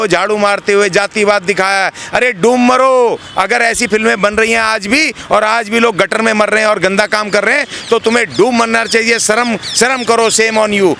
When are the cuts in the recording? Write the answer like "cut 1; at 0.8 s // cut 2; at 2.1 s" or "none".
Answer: none